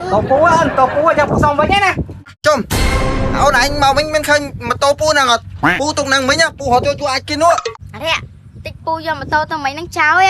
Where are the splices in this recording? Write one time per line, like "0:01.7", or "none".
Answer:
0:02.3
0:07.7